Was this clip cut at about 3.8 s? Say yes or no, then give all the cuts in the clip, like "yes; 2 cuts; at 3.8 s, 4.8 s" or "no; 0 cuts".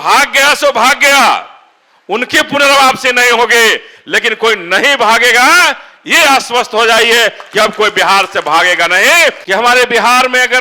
no; 1 cut; at 9.4 s